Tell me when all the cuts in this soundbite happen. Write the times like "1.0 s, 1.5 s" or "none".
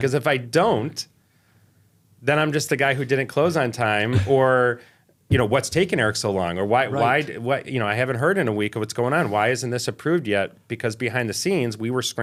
none